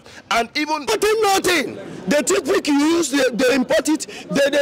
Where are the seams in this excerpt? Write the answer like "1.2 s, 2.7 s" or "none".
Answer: 0.9 s